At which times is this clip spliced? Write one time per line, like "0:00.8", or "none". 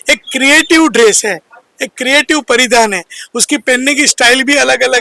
none